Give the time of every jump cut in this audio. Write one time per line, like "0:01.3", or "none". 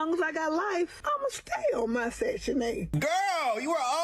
0:01.0
0:02.9

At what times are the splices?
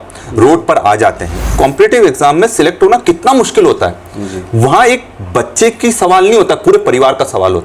0:01.5

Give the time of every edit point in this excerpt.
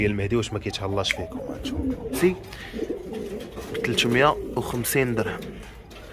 0:02.2

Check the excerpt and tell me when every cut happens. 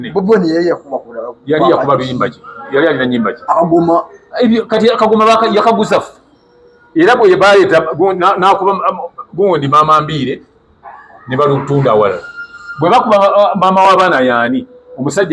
none

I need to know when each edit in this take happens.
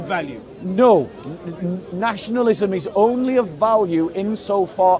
none

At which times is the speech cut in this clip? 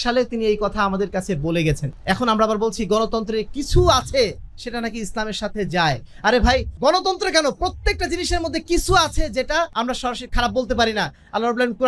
0:01.9
0:06.7
0:09.7

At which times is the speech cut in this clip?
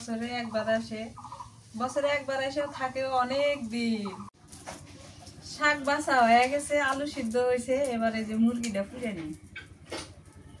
0:04.3

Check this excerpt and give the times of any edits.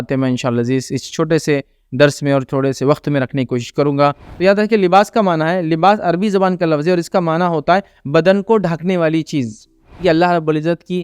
0:04.2
0:10.0

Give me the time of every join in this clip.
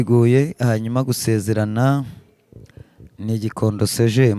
none

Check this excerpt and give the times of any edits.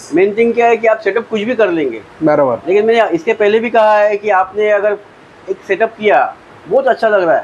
none

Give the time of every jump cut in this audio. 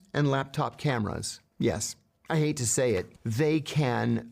0:03.2

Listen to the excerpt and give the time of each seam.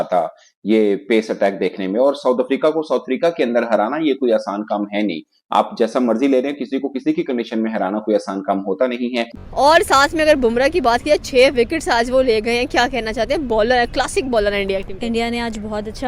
0:09.3

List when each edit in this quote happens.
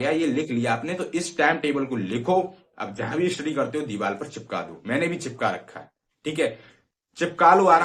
none

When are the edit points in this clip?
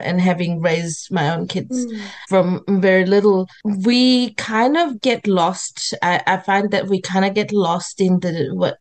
none

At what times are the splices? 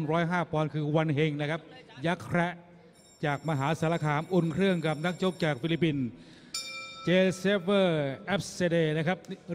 0:06.2

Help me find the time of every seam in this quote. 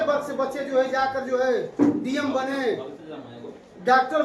none

